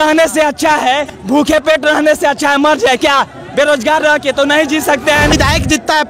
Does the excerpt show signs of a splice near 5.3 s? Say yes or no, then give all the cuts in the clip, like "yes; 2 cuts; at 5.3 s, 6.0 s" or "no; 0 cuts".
yes; 2 cuts; at 1.1 s, 5.3 s